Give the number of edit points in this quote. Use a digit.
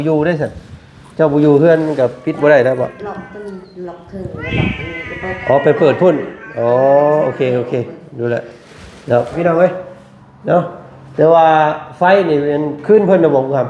1